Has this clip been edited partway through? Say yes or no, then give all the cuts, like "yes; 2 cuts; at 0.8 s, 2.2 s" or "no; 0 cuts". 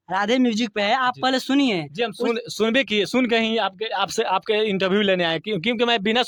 no; 0 cuts